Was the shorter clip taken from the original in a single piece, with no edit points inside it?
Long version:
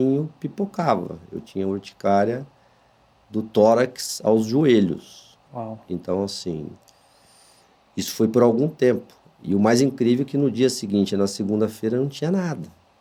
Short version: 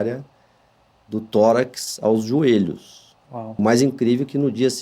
no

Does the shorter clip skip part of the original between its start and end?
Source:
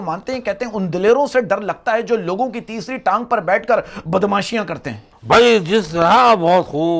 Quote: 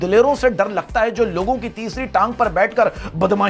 no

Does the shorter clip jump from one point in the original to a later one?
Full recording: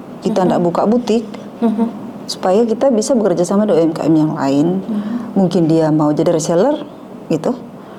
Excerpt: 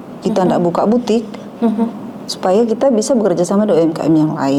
no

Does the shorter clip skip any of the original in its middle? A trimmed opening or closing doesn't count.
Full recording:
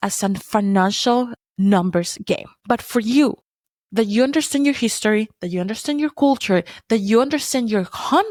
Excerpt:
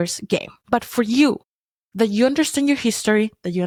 no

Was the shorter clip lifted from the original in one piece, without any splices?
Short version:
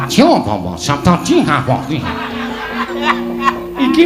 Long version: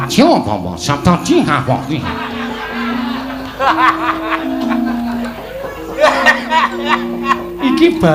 no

